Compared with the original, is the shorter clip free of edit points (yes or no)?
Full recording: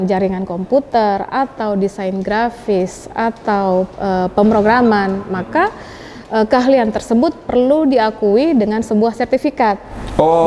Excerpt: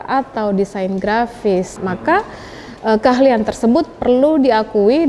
no